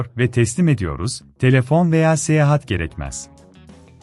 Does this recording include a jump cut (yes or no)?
yes